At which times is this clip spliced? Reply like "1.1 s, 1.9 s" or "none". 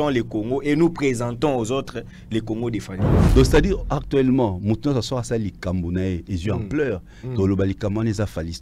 3.1 s